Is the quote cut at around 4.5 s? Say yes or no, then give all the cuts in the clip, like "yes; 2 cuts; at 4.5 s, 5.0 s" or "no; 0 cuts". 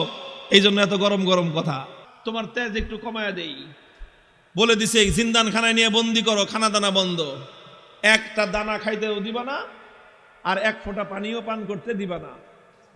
no; 1 cut; at 2.0 s